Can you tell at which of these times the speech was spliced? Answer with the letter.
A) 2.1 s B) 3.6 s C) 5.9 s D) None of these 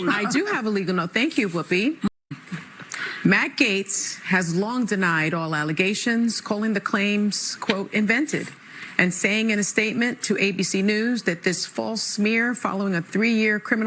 A